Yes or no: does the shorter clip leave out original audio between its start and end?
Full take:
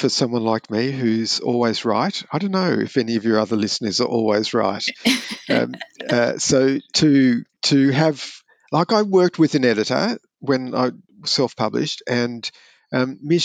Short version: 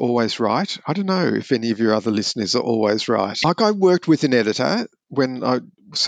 yes